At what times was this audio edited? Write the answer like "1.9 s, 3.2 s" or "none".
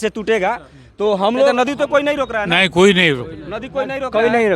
1.7 s

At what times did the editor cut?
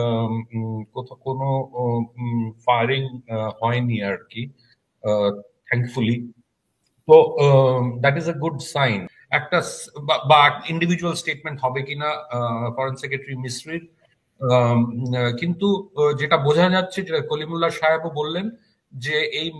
9.2 s

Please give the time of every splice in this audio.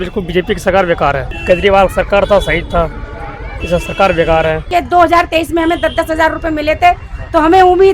1.3 s, 4.7 s

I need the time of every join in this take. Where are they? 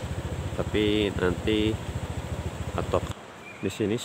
3.1 s

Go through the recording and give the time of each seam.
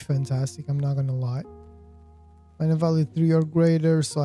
none

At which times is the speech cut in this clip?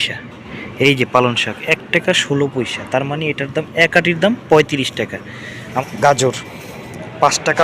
5.7 s

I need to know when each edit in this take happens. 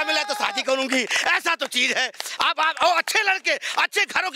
none

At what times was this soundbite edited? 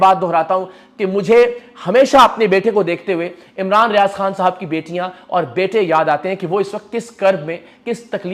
none

